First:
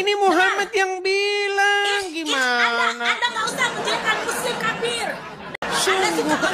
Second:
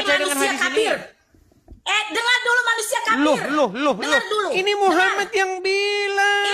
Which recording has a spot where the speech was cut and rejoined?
first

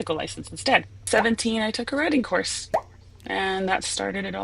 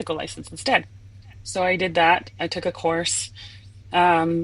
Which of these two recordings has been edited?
first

